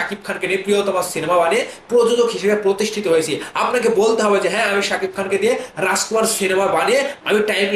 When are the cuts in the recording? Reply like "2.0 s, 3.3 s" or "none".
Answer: none

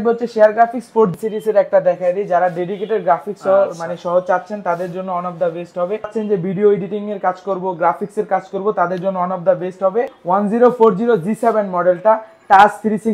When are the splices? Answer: 1.2 s, 6.2 s, 10.2 s

